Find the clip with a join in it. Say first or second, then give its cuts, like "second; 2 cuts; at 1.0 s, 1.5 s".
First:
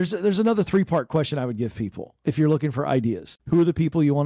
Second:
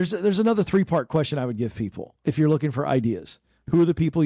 first; 1 cut; at 3.3 s